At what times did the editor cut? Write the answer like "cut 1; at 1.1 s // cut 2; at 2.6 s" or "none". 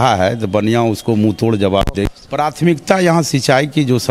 cut 1; at 2.2 s